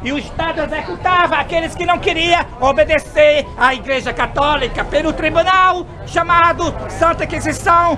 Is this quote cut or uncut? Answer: uncut